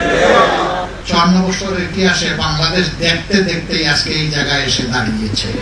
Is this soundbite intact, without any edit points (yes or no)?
no